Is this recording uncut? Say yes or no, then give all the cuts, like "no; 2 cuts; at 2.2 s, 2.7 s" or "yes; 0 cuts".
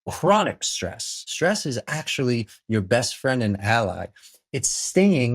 no; 1 cut; at 1.3 s